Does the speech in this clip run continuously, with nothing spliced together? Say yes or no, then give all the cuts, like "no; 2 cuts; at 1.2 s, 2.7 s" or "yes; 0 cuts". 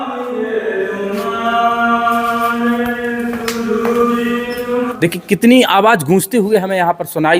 no; 1 cut; at 4.9 s